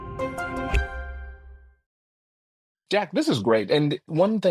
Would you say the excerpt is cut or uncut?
uncut